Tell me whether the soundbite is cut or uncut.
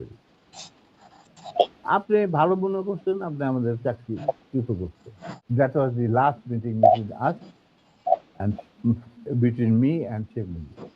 cut